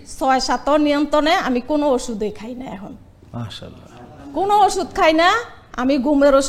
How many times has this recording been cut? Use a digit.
0